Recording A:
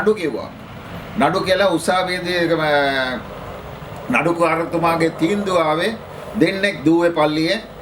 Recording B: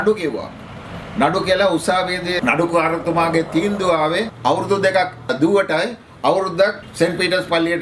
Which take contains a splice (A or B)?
B